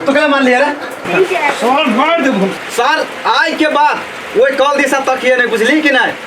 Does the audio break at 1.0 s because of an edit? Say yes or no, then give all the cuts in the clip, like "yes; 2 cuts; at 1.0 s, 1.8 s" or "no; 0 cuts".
yes; 1 cut; at 1.0 s